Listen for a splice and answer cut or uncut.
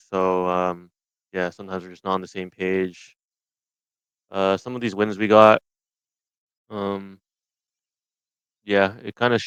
uncut